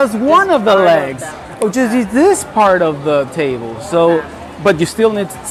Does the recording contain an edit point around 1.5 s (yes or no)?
no